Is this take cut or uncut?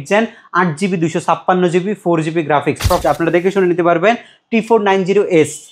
cut